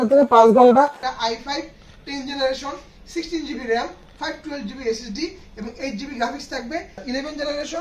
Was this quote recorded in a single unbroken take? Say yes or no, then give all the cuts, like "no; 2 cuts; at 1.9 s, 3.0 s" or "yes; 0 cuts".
no; 2 cuts; at 1.0 s, 6.9 s